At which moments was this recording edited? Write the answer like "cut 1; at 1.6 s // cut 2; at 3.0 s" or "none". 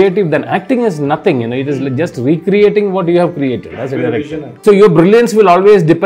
cut 1; at 4.4 s